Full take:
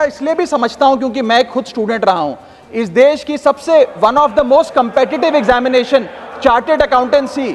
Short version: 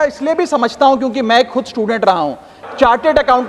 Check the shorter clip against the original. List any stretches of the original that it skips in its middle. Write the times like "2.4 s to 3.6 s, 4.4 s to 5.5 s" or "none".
2.6 s to 6.2 s